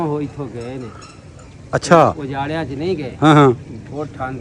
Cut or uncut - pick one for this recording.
uncut